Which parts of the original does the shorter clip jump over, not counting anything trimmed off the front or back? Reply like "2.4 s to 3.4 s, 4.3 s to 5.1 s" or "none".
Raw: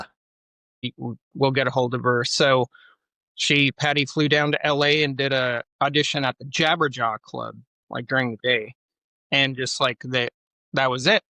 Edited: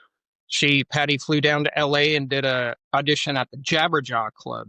none